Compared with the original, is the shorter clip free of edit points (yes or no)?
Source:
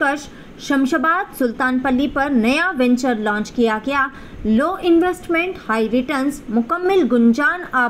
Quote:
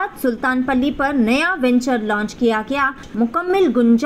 no